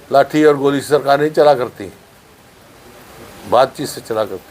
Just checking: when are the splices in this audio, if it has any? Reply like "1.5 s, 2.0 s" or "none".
none